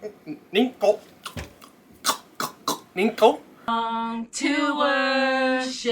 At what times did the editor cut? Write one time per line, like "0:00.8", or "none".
0:03.5